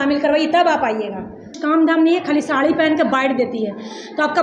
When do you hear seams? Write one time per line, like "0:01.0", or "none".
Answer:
0:01.5

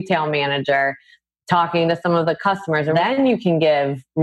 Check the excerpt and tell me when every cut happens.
0:02.9

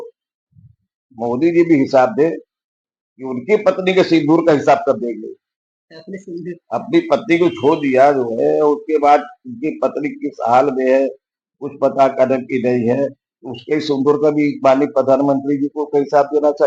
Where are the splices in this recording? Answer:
none

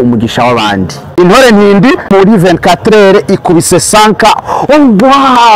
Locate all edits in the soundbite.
0:01.0
0:02.1

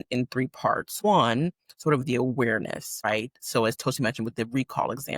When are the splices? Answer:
0:01.0
0:03.1

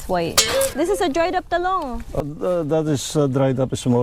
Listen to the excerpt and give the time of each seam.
0:00.8
0:02.2

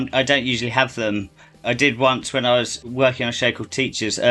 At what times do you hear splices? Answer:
0:01.6
0:02.8

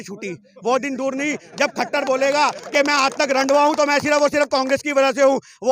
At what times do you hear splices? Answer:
none

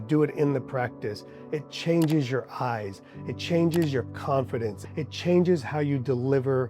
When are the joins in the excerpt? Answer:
0:04.8

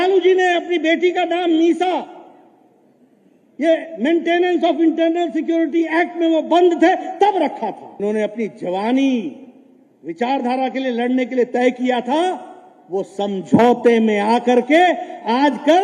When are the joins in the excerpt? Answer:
0:08.0

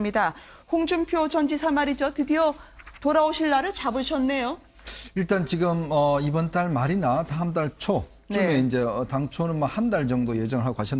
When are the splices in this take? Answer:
none

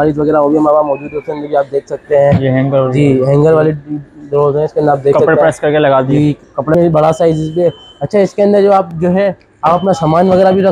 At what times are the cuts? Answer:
0:06.7

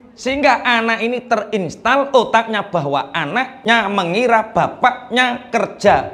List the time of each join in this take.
0:03.5

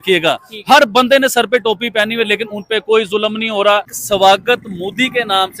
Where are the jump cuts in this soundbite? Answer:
0:04.0

